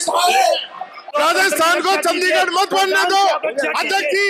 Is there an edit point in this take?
yes; 1 cut; at 1.0 s

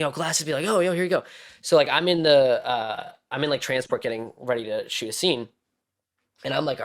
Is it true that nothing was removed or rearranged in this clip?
yes; 0 cuts

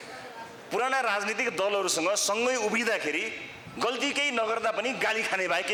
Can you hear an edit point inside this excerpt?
no; 0 cuts

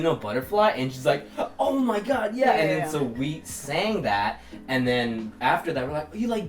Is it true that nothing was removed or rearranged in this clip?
yes; 0 cuts

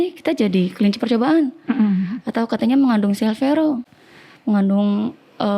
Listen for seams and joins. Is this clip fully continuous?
yes; 0 cuts

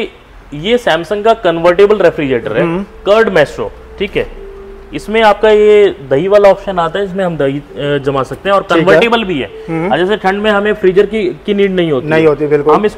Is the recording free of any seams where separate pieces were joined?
yes; 0 cuts

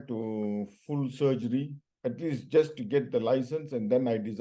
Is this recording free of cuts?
no; 1 cut; at 1.8 s

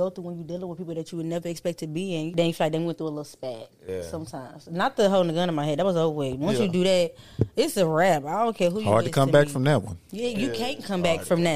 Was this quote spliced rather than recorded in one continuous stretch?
yes; 1 cut; at 2.3 s

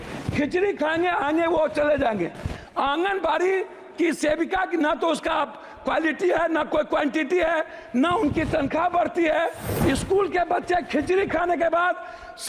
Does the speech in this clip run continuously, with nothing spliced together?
no; 1 cut; at 9.6 s

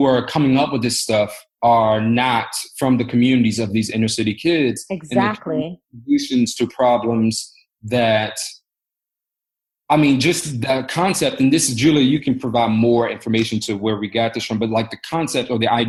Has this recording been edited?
no; 0 cuts

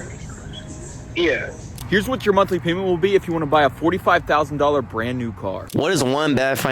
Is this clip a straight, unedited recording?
no; 2 cuts; at 1.7 s, 5.6 s

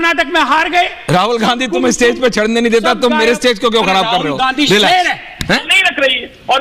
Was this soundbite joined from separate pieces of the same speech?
no; 0 cuts

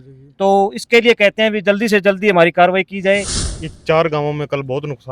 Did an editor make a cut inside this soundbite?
yes; 1 cut; at 3.4 s

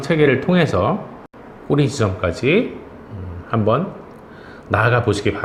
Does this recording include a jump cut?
no; 0 cuts

